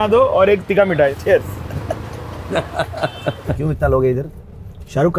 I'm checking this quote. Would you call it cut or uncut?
cut